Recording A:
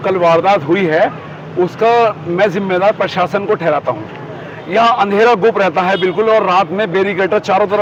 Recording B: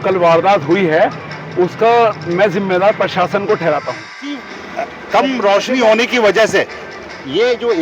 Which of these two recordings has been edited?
B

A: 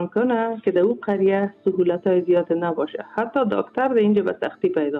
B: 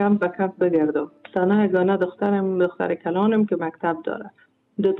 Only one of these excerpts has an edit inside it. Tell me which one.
B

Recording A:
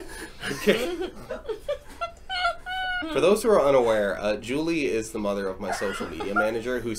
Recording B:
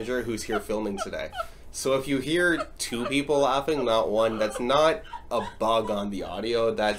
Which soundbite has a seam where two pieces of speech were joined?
A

